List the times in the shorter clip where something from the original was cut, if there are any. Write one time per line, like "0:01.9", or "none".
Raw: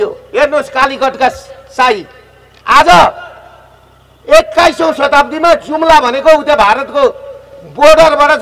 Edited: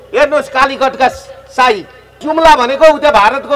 0:02.2